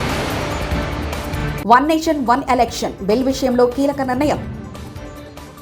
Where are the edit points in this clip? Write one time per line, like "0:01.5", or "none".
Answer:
0:01.5